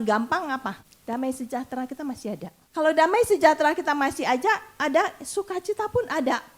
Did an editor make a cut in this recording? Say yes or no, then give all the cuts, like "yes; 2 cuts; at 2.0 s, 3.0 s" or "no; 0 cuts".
yes; 2 cuts; at 0.9 s, 2.6 s